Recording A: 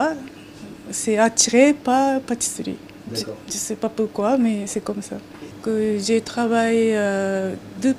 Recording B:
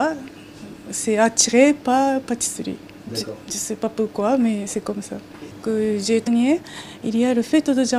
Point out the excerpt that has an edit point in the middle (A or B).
A